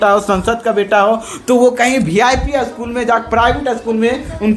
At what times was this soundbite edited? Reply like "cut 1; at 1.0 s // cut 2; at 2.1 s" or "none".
none